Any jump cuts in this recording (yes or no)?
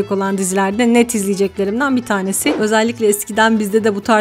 yes